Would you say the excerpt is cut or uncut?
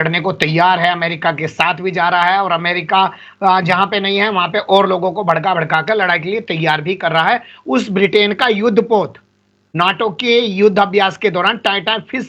uncut